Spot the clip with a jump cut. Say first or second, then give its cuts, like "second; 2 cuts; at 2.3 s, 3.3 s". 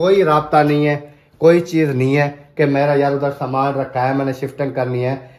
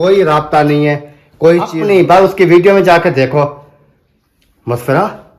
second; 1 cut; at 1.7 s